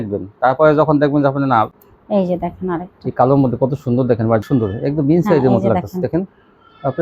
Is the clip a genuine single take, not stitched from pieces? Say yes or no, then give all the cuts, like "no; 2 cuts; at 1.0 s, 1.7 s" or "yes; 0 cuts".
no; 2 cuts; at 1.9 s, 4.4 s